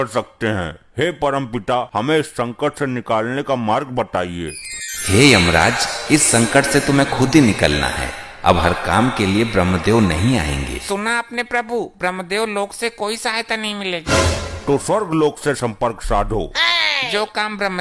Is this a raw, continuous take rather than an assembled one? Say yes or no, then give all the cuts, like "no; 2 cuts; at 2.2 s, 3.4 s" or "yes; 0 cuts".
yes; 0 cuts